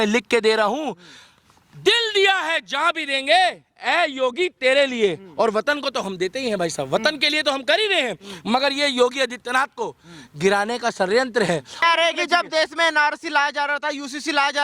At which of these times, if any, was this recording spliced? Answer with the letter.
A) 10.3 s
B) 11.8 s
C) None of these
B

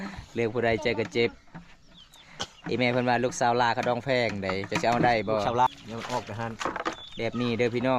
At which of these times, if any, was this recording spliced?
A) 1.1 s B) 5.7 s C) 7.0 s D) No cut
B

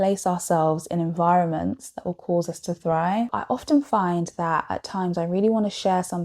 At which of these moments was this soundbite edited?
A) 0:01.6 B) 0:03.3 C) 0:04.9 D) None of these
B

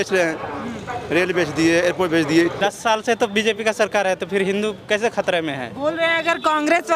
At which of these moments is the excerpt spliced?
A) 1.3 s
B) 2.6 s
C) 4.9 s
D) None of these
B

